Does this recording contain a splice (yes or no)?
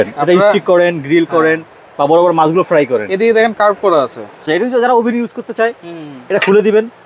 yes